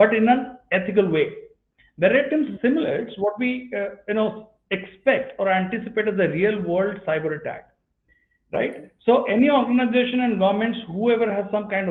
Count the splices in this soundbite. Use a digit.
0